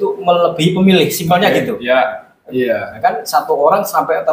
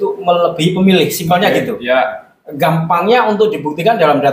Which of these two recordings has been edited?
first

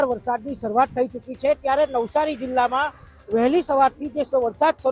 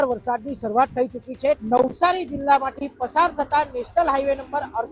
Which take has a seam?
second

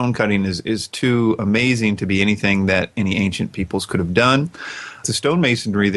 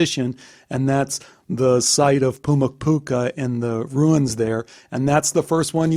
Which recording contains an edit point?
first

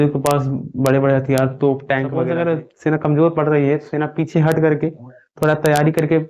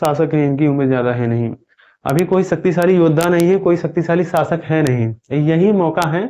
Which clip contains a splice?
first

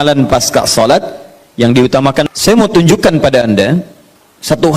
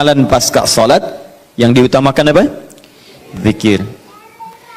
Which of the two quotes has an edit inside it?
first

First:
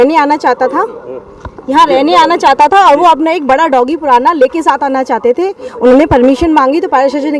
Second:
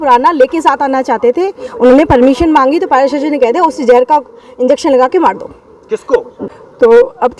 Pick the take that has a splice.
second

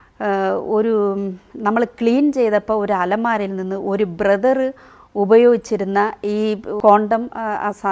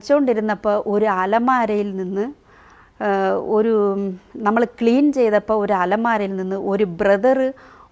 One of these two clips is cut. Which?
first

